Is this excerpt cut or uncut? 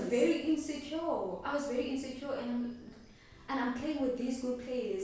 uncut